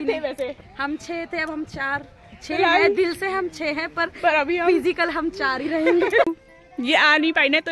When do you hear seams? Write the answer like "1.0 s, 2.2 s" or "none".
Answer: 6.3 s